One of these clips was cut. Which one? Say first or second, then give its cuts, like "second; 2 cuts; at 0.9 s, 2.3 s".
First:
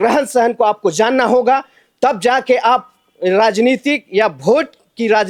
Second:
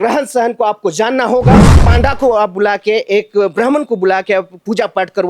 second; 1 cut; at 1.8 s